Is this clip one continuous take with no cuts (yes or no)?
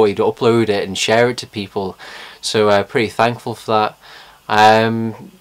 yes